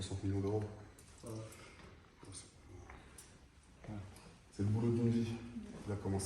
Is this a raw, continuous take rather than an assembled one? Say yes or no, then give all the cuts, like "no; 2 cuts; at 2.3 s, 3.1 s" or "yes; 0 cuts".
yes; 0 cuts